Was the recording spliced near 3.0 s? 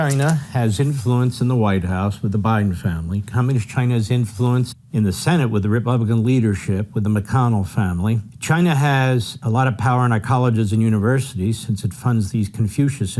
no; 3 cuts; at 4.3 s, 8.3 s, 9.3 s

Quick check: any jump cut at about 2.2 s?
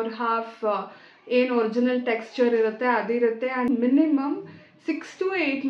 no; 1 cut; at 3.7 s

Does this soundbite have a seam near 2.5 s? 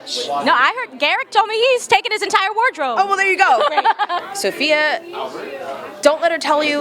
no; 1 cut; at 4.2 s

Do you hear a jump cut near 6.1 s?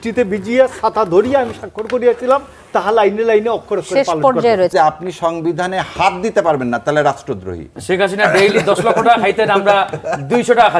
no; 2 cuts; at 4.7 s, 7.7 s

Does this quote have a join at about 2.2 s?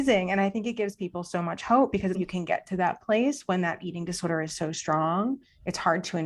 yes; 1 cut; at 2.2 s

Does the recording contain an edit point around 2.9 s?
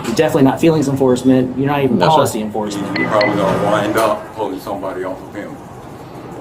yes; 1 cut; at 2.9 s

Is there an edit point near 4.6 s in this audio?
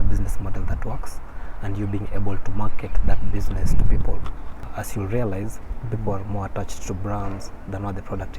yes; 1 cut; at 4.6 s

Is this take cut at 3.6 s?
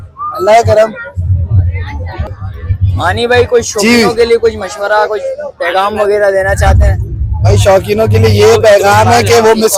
no; 0 cuts

